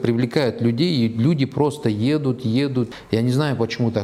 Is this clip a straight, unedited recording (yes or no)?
yes